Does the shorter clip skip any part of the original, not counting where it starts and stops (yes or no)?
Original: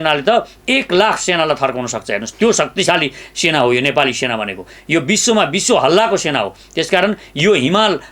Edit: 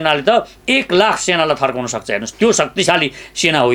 no